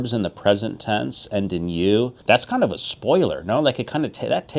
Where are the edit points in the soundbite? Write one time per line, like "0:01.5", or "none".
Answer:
0:02.2